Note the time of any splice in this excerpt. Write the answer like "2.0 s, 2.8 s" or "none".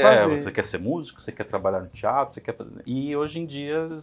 none